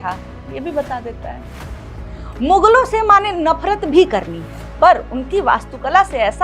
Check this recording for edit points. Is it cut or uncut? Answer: uncut